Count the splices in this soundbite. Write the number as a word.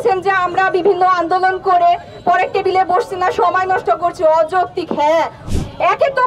one